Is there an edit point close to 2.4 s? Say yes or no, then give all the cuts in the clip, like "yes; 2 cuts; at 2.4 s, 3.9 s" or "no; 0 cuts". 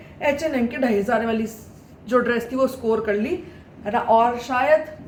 no; 0 cuts